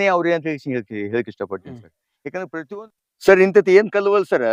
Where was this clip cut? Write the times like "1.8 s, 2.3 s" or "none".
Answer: 2.7 s